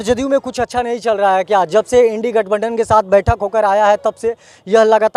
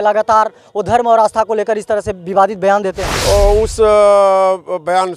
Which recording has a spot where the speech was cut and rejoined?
second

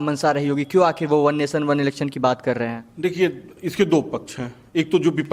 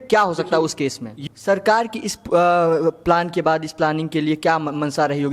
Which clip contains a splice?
second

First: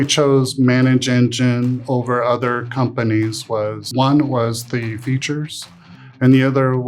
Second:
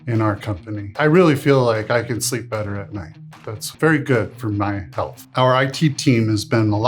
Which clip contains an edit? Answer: second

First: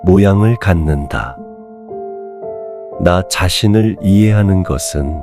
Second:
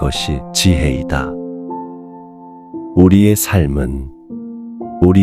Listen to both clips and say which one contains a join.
first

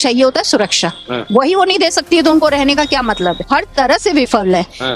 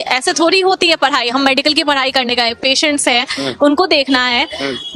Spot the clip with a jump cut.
first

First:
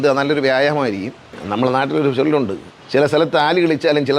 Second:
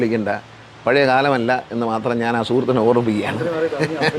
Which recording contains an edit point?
first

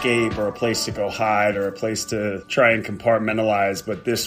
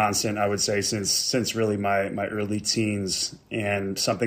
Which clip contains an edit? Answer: first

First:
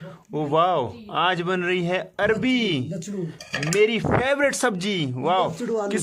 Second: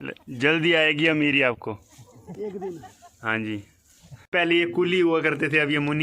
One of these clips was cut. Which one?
second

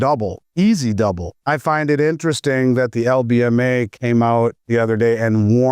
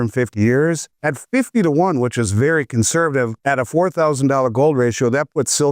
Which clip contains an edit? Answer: first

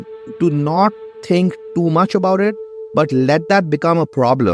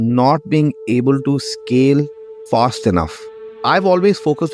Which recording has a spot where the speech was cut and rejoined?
second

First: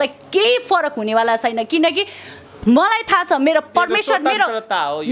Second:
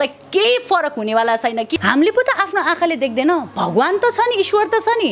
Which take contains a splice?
second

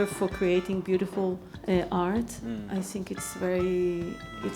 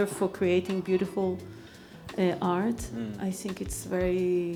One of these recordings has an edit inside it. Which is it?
first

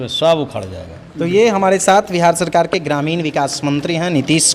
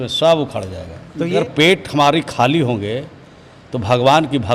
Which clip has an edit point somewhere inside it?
second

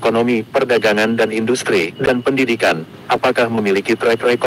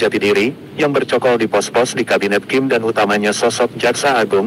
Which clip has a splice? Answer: first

